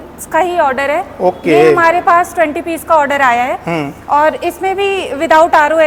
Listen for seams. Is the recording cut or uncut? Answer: uncut